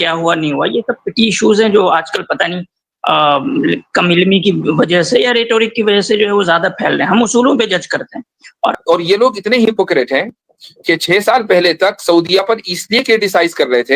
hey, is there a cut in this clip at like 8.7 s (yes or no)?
yes